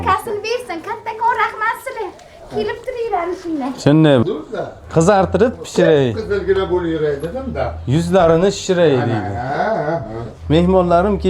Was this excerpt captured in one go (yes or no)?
no